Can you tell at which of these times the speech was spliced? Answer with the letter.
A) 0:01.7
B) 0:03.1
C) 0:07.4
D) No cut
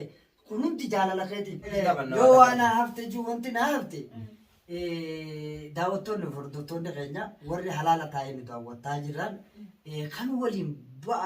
A